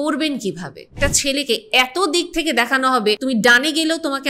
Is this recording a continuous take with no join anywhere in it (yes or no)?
no